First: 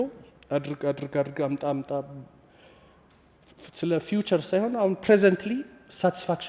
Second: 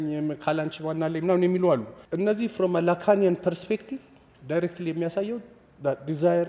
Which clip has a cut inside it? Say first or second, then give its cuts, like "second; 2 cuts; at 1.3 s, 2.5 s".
second; 1 cut; at 2.0 s